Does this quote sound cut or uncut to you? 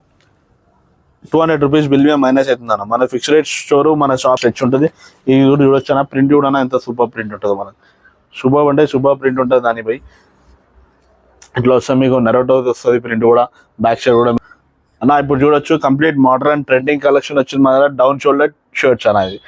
cut